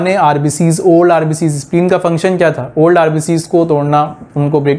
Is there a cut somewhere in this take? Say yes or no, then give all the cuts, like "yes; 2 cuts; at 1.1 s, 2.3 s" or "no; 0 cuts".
no; 0 cuts